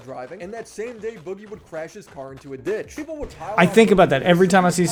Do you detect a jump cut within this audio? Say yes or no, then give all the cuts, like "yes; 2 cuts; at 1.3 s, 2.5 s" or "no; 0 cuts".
no; 0 cuts